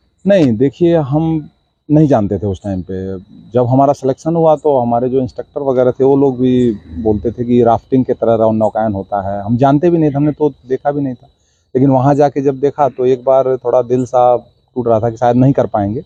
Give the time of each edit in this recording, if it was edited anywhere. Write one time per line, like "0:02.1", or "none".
none